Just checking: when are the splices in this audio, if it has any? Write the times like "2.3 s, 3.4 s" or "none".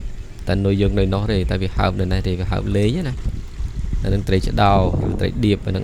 none